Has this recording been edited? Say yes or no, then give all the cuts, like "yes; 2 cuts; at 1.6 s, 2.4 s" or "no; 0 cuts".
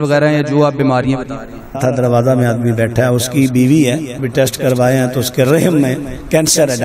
yes; 2 cuts; at 1.8 s, 4.1 s